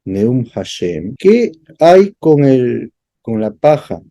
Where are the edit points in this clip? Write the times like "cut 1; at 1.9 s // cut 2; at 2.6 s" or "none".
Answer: cut 1; at 1.1 s

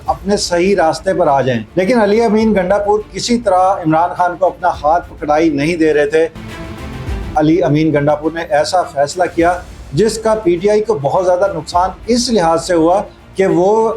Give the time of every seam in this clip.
cut 1; at 6.7 s

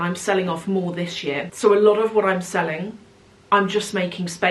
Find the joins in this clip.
cut 1; at 1.5 s

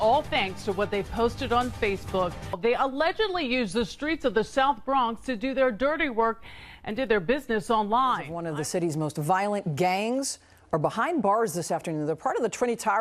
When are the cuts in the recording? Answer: cut 1; at 2.5 s // cut 2; at 8.6 s

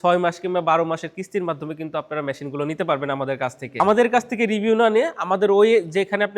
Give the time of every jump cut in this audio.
cut 1; at 3.8 s

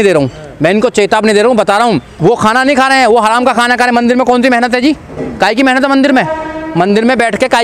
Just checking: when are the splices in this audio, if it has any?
cut 1; at 2.1 s

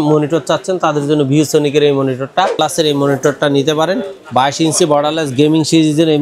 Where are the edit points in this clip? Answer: cut 1; at 2.5 s

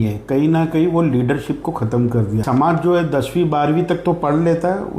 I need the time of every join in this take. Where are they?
cut 1; at 2.4 s

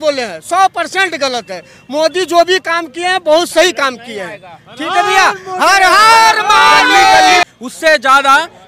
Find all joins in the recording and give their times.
cut 1; at 7.4 s

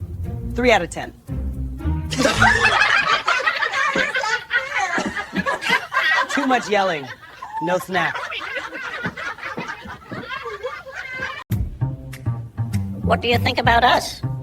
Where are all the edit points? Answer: none

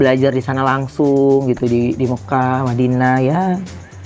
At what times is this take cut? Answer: none

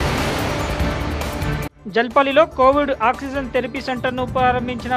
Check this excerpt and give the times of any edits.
cut 1; at 1.7 s

